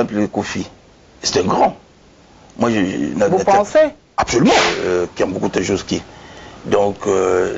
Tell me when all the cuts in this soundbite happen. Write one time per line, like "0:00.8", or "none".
0:04.7